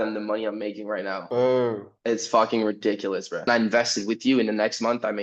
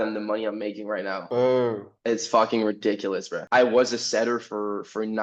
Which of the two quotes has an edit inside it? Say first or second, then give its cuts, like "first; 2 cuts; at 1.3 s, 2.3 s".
first; 1 cut; at 3.5 s